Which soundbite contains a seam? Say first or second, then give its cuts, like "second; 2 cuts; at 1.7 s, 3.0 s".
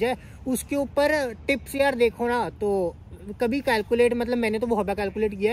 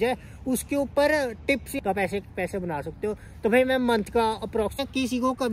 second; 2 cuts; at 1.7 s, 4.8 s